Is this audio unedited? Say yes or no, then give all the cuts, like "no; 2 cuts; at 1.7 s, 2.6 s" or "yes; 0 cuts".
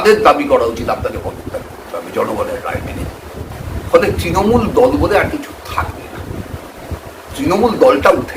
no; 2 cuts; at 3.4 s, 6.9 s